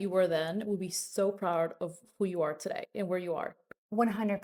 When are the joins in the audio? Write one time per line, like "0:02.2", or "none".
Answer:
none